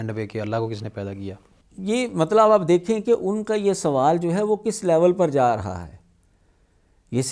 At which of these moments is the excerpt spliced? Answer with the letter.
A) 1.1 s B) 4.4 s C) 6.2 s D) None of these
D